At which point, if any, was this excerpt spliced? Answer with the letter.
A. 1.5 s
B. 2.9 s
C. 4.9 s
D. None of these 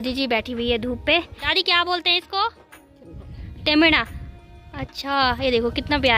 A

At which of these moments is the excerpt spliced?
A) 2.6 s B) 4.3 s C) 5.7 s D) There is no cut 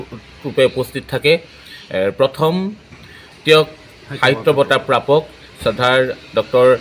D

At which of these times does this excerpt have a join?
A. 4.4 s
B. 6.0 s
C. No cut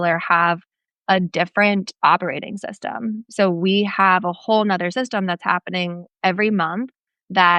C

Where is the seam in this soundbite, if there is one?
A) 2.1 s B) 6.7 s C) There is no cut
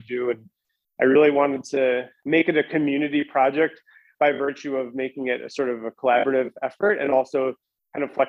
A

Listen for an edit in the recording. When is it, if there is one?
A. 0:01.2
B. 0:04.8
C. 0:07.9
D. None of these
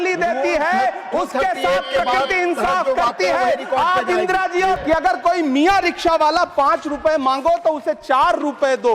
B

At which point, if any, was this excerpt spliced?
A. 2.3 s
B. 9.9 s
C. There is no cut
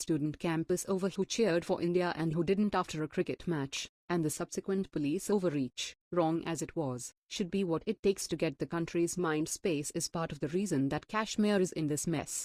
B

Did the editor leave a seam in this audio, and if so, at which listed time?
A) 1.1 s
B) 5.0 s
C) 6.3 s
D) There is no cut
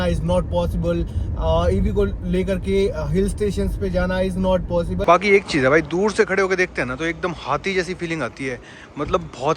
B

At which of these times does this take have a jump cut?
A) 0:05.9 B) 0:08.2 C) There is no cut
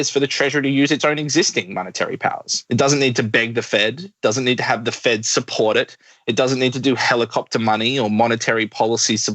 C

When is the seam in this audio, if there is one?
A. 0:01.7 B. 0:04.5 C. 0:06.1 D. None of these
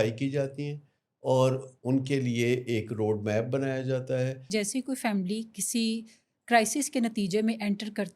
B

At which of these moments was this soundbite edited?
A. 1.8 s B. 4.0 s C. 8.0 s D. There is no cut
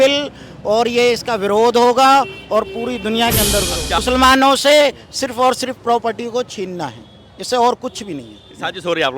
B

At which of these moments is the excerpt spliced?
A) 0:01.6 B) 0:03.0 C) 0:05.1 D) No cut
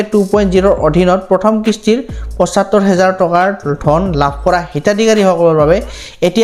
D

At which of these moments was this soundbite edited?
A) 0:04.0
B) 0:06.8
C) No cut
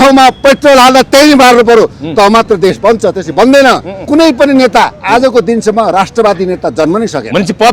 A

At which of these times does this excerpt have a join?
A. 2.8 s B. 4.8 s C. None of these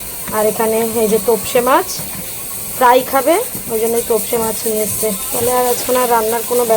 C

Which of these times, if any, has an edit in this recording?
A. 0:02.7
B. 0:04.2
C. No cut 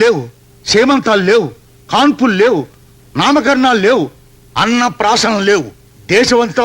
C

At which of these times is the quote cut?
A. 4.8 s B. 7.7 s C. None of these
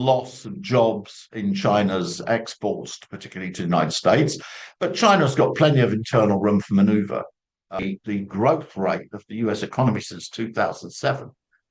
B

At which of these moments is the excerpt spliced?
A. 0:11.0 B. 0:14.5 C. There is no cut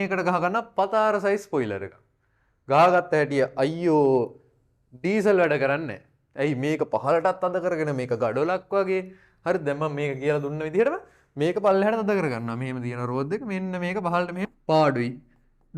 B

